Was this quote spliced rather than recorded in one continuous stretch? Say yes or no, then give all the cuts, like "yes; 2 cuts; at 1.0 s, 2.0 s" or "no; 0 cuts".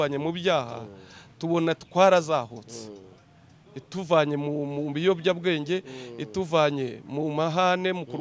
no; 0 cuts